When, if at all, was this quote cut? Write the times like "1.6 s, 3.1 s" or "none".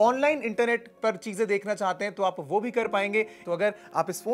3.4 s